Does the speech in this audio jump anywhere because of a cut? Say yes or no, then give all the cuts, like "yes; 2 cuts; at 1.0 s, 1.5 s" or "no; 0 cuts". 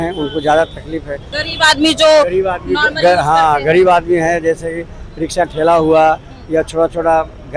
yes; 1 cut; at 1.4 s